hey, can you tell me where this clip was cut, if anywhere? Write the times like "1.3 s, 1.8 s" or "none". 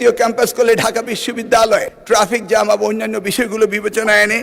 1.9 s